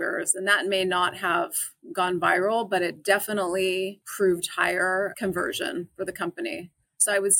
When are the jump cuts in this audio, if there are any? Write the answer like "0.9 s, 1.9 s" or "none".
4.0 s, 5.1 s